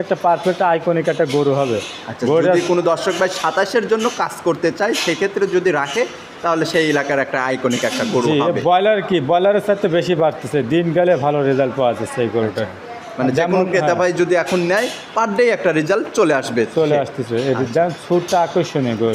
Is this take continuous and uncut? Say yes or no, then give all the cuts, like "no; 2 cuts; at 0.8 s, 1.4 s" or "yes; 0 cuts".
yes; 0 cuts